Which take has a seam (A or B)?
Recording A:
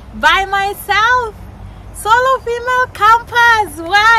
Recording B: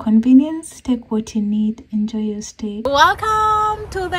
B